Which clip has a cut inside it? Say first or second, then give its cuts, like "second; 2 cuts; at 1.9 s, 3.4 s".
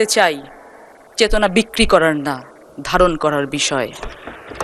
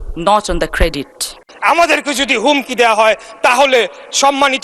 second; 1 cut; at 1.4 s